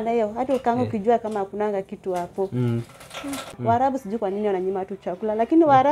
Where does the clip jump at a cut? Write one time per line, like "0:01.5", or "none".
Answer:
0:03.6